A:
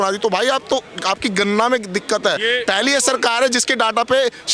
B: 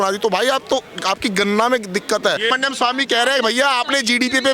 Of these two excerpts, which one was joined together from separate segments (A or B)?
B